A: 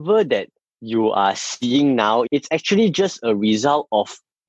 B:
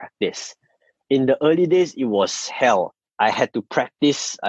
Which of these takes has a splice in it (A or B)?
A